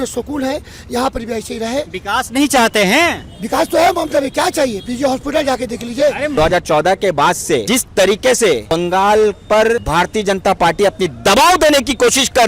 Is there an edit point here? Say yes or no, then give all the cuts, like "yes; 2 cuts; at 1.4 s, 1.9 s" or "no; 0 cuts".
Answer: yes; 1 cut; at 6.3 s